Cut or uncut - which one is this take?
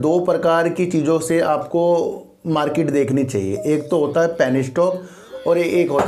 uncut